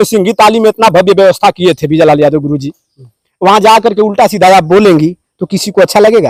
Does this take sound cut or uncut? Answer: uncut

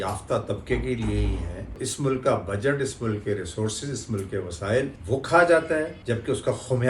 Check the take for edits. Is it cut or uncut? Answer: cut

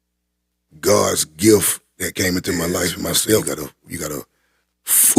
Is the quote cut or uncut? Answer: cut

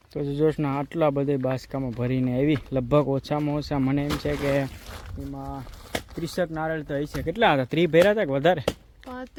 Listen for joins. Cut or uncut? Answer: uncut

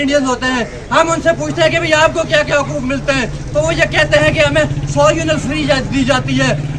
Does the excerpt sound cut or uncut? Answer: uncut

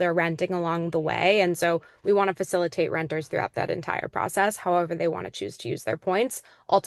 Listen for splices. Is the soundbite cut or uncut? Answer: uncut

